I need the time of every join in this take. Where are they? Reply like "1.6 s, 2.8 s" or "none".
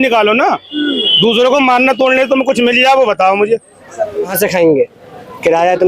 4.3 s

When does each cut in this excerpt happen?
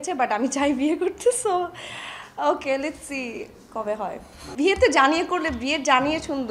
4.5 s

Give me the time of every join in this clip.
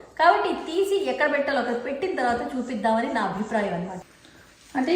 3.9 s

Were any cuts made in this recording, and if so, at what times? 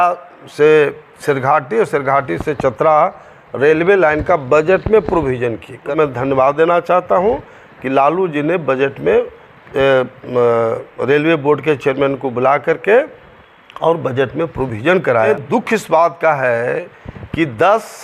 5.9 s, 15.3 s

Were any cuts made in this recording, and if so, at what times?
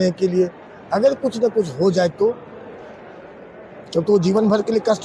none

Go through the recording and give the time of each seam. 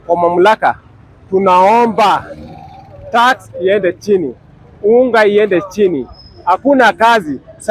none

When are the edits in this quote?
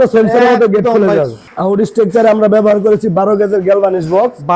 1.4 s

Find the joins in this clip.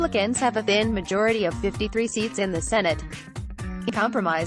none

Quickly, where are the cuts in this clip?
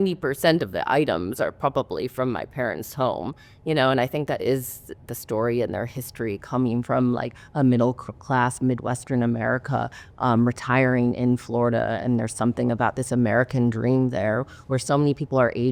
none

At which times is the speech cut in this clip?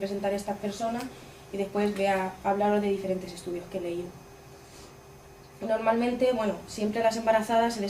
3.3 s

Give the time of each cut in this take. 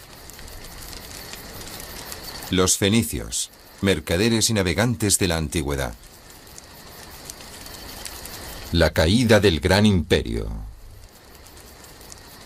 3.3 s

